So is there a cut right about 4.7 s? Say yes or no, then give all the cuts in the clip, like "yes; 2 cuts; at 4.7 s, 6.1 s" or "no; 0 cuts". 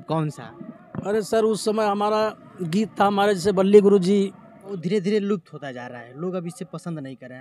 yes; 1 cut; at 4.7 s